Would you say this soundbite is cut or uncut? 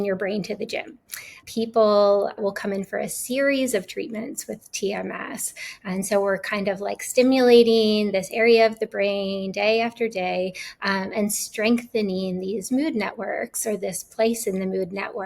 cut